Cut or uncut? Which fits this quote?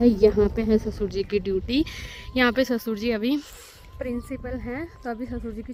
uncut